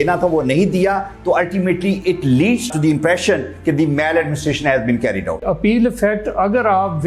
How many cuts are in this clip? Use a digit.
1